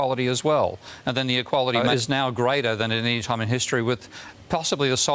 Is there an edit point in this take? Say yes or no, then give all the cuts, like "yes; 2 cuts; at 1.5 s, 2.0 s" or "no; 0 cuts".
yes; 2 cuts; at 0.9 s, 1.8 s